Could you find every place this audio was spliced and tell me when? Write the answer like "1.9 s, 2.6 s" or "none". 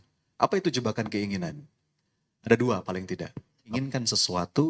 3.7 s